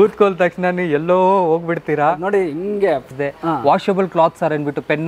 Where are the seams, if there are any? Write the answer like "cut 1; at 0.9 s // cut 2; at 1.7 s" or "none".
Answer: cut 1; at 3.1 s

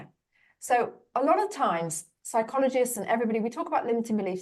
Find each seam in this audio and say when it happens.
cut 1; at 1.1 s

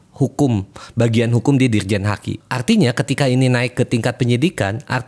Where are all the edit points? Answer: cut 1; at 2.3 s

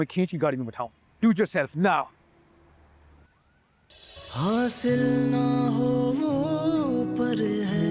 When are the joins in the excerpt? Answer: cut 1; at 3.9 s

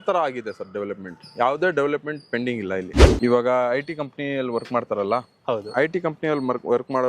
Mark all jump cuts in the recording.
cut 1; at 3.0 s

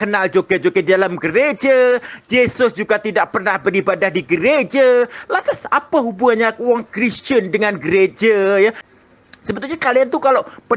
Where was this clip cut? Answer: cut 1; at 8.9 s

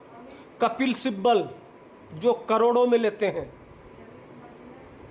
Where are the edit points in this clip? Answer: none

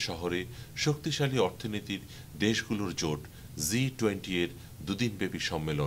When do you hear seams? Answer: none

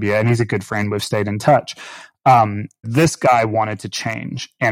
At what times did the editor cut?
cut 1; at 2.8 s

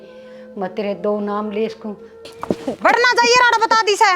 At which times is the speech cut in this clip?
cut 1; at 2.3 s

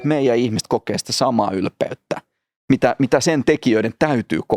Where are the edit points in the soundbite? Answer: none

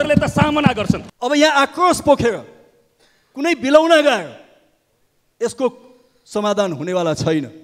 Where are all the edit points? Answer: cut 1; at 1.1 s

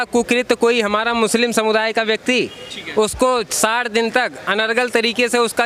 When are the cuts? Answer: none

